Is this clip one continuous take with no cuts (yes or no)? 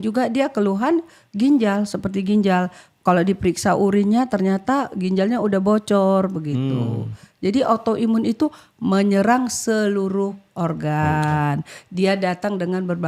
yes